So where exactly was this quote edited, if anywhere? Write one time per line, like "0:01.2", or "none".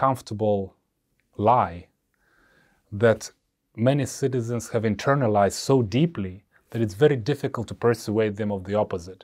none